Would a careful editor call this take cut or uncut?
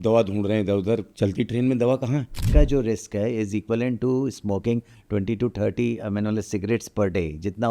cut